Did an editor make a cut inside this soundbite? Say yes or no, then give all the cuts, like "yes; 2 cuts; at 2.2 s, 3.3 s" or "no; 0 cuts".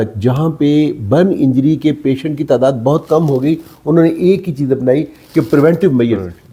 no; 0 cuts